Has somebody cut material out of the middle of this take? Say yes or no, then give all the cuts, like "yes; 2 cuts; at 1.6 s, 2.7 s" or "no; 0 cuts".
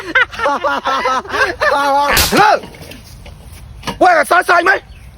no; 0 cuts